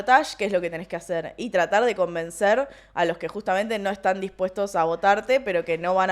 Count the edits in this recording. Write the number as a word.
zero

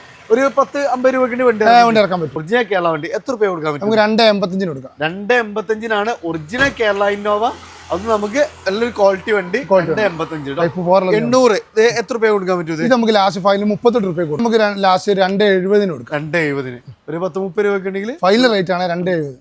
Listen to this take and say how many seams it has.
two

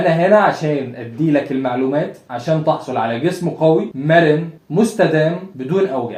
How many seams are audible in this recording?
zero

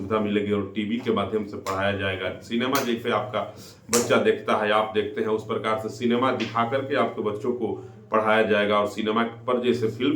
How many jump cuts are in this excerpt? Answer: zero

